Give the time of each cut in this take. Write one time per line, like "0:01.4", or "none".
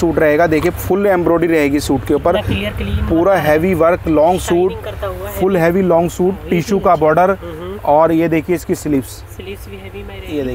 none